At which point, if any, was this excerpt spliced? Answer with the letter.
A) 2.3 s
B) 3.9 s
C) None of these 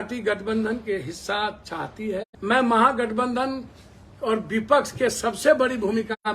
A